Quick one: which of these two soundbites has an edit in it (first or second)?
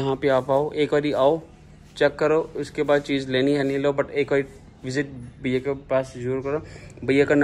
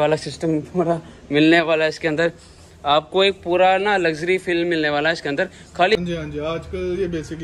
second